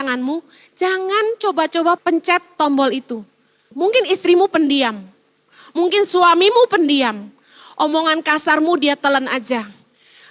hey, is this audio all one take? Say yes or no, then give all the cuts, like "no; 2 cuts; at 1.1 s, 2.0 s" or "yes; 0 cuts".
no; 2 cuts; at 2.0 s, 3.7 s